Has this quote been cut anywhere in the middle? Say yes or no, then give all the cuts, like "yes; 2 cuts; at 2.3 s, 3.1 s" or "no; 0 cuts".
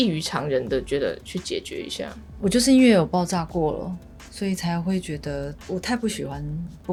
no; 0 cuts